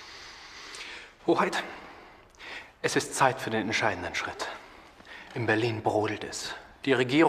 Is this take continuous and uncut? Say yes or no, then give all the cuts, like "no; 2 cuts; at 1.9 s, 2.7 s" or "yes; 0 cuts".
yes; 0 cuts